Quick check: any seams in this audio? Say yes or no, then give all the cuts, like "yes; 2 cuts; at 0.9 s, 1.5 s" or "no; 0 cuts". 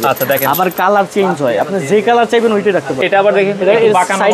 yes; 1 cut; at 2.9 s